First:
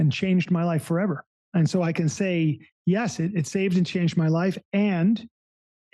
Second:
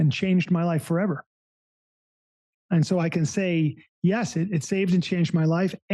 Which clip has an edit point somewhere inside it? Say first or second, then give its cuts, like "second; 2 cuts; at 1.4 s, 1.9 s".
first; 1 cut; at 1.3 s